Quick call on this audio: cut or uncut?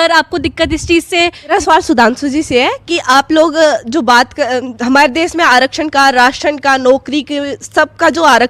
cut